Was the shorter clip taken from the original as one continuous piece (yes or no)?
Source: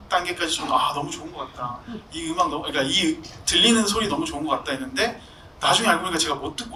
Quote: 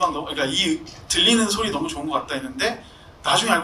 yes